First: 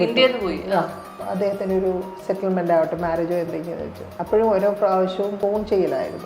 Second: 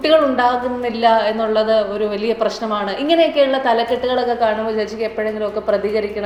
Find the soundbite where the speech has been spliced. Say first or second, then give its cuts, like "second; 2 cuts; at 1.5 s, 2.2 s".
first; 3 cuts; at 1.2 s, 4.1 s, 5.4 s